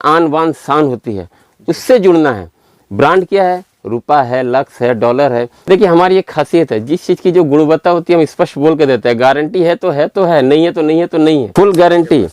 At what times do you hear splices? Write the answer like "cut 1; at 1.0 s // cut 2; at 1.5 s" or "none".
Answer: cut 1; at 5.5 s // cut 2; at 11.5 s